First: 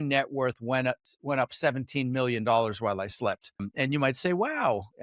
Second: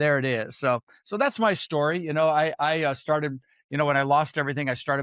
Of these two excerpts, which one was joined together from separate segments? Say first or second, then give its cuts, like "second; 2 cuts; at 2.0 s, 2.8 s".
first; 2 cuts; at 1.1 s, 3.7 s